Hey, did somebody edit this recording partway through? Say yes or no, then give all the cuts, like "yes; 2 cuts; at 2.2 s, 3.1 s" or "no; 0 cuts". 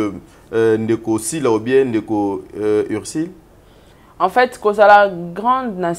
no; 0 cuts